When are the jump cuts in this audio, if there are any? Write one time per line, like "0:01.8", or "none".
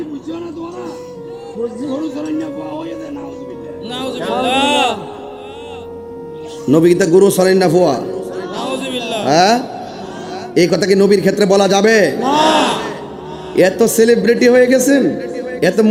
none